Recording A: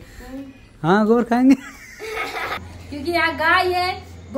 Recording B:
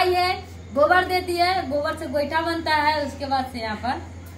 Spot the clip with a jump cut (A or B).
A